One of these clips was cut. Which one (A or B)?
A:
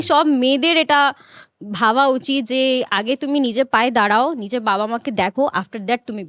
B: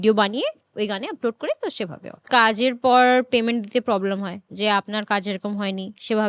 B